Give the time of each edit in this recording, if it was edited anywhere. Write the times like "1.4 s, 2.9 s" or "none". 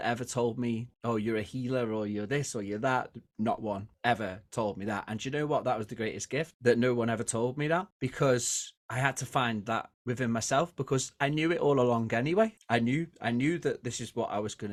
none